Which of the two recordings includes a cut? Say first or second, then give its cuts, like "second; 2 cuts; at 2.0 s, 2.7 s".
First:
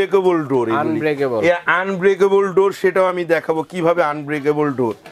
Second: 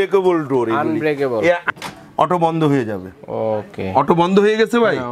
second; 1 cut; at 1.7 s